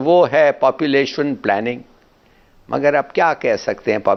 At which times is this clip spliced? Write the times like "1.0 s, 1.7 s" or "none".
none